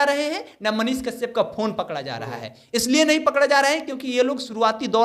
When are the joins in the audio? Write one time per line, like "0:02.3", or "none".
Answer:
none